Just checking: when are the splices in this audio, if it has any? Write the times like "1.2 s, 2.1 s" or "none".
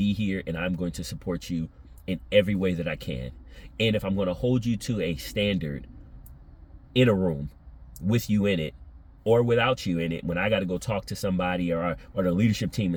none